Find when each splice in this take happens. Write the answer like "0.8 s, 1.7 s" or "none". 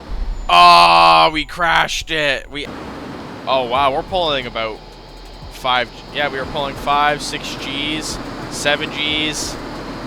2.6 s

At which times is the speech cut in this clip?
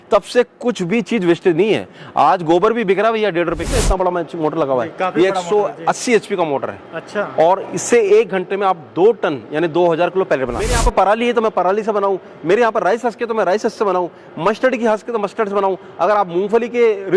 3.7 s, 10.8 s

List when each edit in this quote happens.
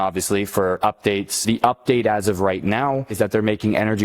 1.4 s, 3.1 s

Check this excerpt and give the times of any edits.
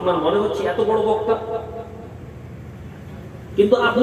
none

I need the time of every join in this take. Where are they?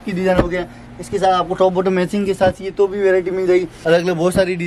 3.7 s

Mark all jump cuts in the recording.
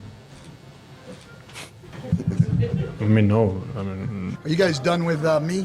1.9 s, 4.3 s

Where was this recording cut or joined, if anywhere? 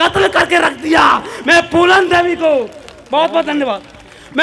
none

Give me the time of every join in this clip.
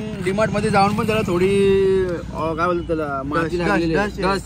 none

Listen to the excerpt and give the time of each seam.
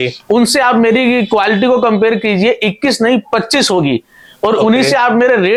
none

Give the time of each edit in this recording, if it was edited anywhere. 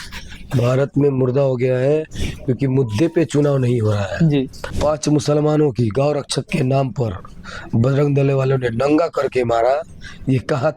4.6 s

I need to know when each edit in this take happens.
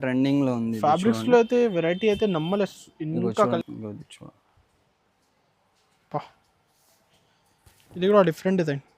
3.4 s

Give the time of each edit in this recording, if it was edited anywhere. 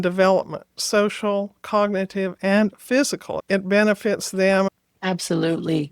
3.3 s, 4.7 s

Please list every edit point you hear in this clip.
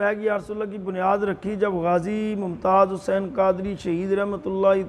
none

